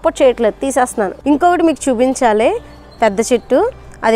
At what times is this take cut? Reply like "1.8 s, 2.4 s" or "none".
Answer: 1.1 s